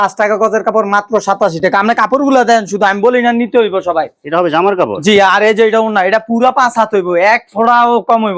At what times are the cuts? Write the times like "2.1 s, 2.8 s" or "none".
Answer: none